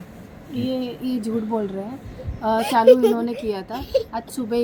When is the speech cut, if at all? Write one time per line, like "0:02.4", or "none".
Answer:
none

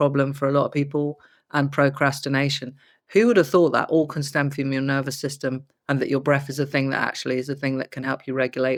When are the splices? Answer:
none

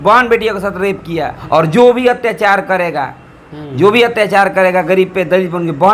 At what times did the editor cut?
0:01.4

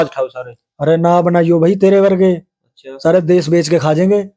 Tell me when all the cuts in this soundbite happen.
none

